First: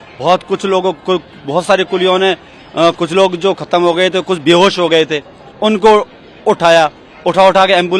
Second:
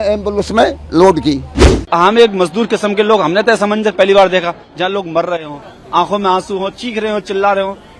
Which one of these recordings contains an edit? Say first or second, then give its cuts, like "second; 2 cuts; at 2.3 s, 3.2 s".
second; 1 cut; at 1.7 s